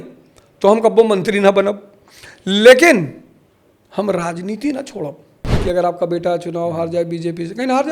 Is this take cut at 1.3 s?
no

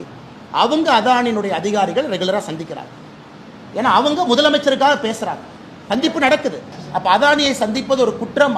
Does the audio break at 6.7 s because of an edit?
yes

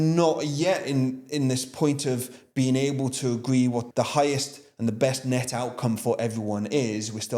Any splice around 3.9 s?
yes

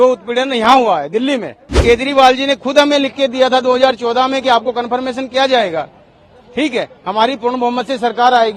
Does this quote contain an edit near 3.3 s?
no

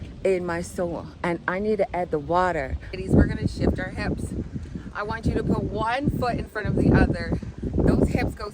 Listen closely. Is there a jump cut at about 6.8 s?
no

